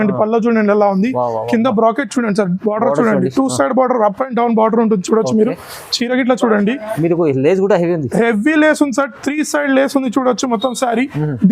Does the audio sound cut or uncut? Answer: cut